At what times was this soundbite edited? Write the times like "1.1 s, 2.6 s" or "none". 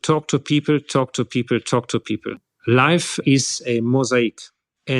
2.4 s